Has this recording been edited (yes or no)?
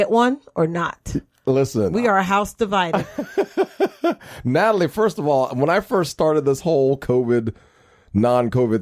no